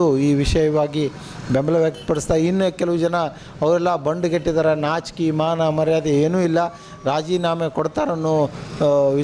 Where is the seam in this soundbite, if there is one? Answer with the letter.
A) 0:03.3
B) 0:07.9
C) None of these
C